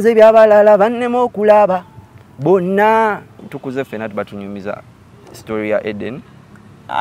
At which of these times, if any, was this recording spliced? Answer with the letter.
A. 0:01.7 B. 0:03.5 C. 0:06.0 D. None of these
B